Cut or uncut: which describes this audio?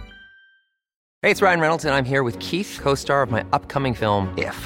uncut